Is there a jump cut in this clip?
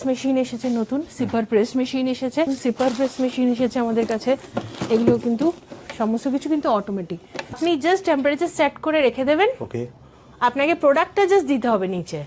yes; 2 cuts; at 2.5 s, 7.6 s

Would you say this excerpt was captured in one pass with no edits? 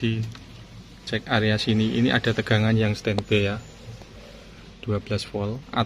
yes; 0 cuts

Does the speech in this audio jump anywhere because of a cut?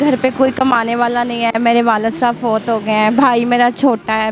no; 0 cuts

